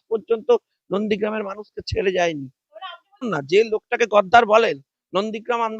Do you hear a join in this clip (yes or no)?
yes